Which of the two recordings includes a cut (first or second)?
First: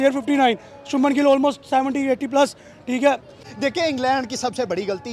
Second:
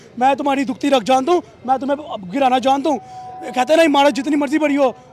first